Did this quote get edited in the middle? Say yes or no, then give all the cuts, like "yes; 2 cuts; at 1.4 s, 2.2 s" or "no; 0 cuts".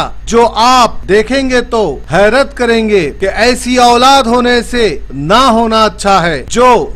no; 0 cuts